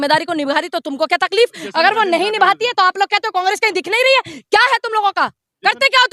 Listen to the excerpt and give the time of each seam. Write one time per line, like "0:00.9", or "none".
none

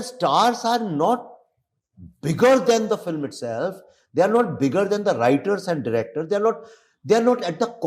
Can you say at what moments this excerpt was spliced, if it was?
none

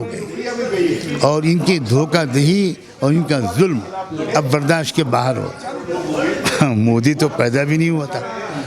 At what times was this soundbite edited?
0:05.8

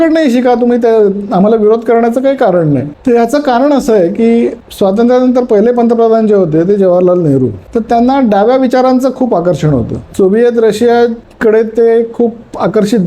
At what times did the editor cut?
0:02.9
0:10.1

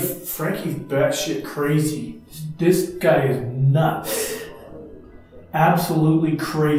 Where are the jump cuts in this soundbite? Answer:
none

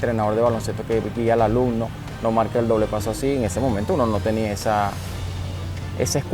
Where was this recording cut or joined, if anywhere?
none

